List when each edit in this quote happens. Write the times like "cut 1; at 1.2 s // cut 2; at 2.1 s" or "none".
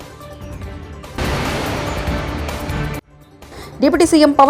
none